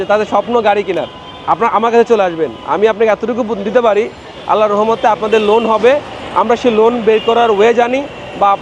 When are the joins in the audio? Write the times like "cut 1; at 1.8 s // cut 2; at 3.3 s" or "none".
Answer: none